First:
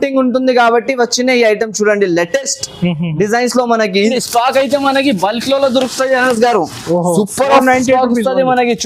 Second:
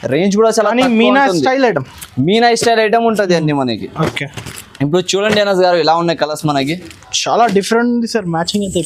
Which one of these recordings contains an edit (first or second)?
first